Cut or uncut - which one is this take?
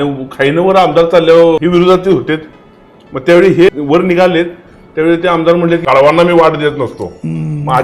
cut